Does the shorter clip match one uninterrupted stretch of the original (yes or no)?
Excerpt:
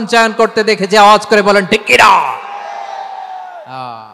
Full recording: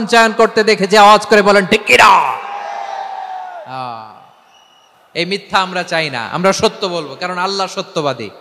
yes